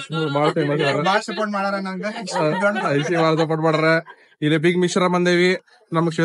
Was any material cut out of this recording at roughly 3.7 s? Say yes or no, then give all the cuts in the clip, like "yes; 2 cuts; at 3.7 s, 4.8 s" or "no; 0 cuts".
no; 0 cuts